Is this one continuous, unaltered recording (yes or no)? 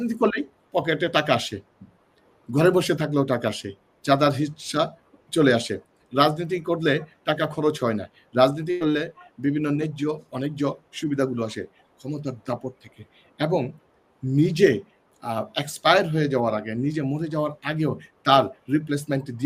yes